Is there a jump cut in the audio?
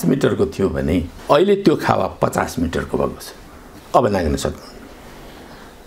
no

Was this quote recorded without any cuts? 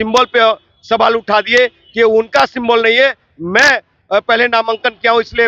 yes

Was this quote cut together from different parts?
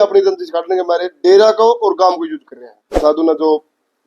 yes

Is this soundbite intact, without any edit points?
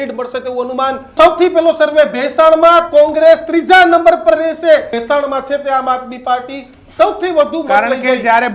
no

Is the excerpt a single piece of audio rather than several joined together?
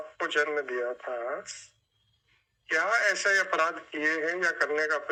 yes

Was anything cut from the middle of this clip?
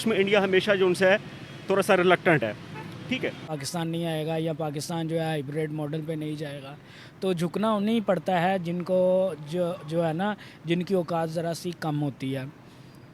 yes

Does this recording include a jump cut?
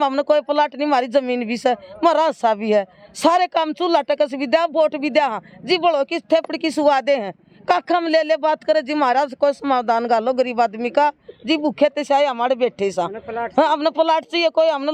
no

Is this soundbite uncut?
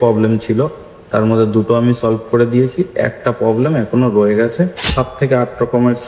no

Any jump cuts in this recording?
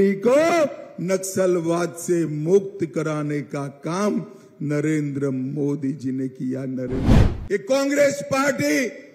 yes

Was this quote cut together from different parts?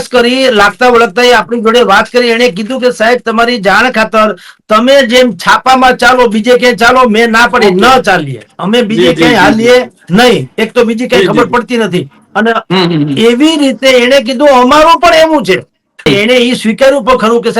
yes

